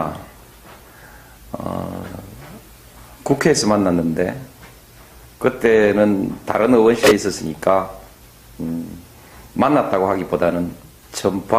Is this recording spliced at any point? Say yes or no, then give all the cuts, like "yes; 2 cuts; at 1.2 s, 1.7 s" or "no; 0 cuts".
yes; 1 cut; at 8.4 s